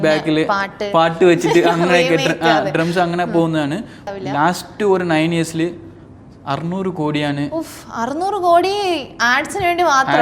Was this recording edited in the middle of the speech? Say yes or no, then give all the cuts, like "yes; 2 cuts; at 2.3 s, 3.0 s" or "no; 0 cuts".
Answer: yes; 1 cut; at 4.0 s